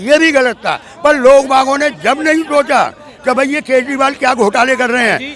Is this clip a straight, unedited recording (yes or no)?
yes